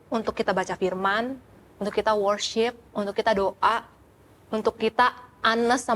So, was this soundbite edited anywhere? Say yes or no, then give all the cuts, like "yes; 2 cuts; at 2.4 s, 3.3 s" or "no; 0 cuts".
no; 0 cuts